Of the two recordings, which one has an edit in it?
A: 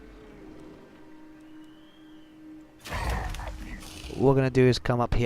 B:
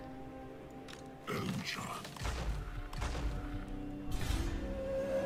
A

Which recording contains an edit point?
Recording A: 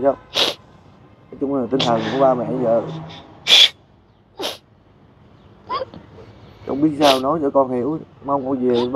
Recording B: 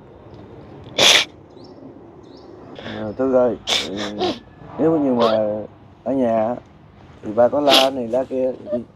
B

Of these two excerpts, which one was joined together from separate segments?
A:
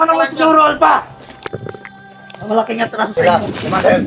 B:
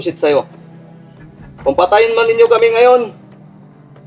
A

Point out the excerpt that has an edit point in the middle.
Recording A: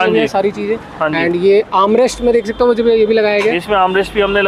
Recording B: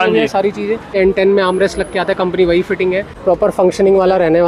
B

